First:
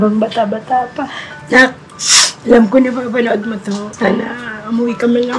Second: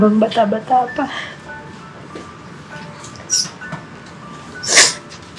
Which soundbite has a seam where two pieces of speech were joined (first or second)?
first